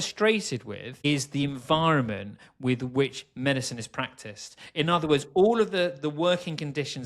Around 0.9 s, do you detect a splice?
yes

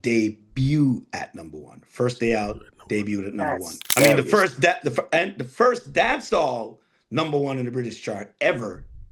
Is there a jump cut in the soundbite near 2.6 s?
no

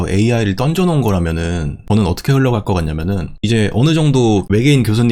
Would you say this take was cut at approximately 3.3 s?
yes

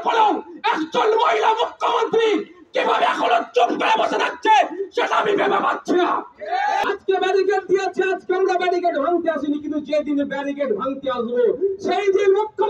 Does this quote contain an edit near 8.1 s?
no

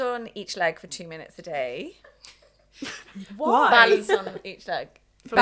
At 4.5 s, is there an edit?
no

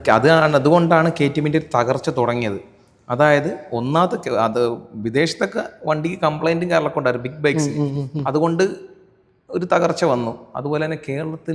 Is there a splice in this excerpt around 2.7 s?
no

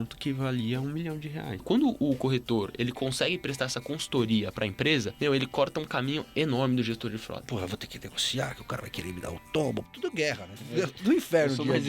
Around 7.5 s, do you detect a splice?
yes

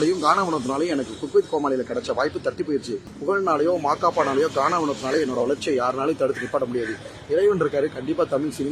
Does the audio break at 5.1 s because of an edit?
no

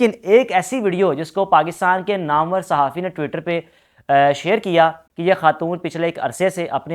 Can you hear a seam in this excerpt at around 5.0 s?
yes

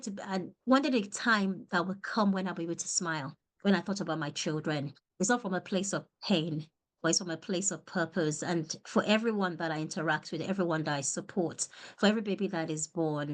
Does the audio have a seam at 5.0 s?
yes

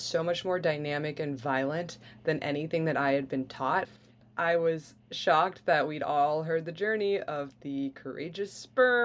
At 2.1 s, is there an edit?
no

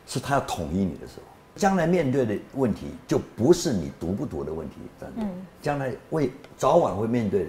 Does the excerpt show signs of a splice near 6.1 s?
no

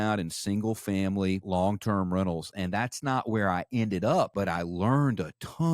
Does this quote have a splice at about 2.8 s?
no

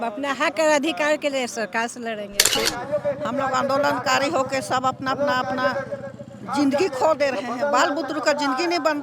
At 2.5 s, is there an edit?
yes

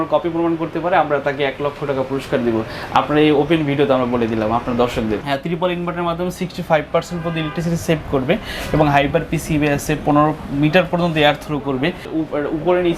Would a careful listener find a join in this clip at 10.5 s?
no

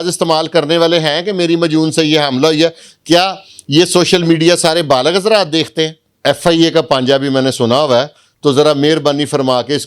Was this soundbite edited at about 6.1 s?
yes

